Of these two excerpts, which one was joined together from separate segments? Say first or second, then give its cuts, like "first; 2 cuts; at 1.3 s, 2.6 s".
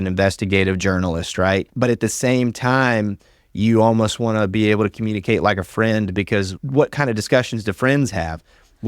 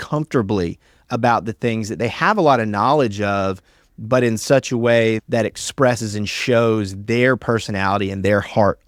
first; 1 cut; at 1.7 s